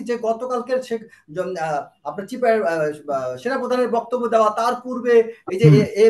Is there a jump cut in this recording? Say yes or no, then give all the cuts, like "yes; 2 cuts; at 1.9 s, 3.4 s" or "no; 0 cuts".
no; 0 cuts